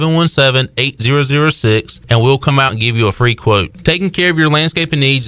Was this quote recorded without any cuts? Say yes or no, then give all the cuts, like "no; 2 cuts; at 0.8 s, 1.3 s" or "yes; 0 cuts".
yes; 0 cuts